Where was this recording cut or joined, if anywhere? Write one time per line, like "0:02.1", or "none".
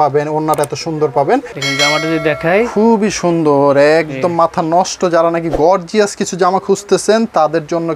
0:01.6